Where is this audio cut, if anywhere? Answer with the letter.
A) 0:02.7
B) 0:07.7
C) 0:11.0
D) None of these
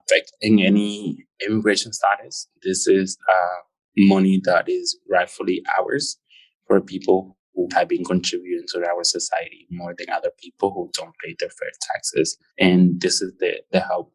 B